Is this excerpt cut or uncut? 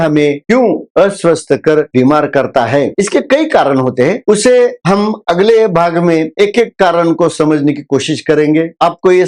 uncut